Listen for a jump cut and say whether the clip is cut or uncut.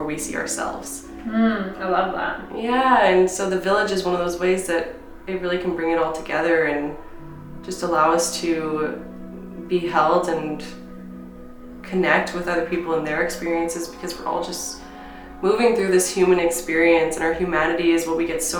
uncut